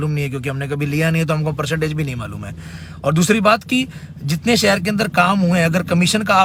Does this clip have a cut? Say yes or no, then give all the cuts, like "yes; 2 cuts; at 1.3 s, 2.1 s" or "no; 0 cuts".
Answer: no; 0 cuts